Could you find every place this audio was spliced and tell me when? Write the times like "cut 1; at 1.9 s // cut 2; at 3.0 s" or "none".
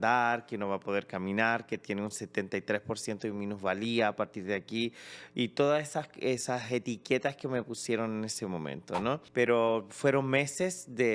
cut 1; at 9.2 s